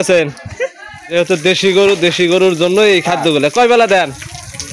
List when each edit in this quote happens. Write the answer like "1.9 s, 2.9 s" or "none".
1.1 s